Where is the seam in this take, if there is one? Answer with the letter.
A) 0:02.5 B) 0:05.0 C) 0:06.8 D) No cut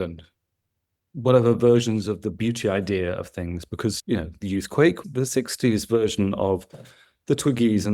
B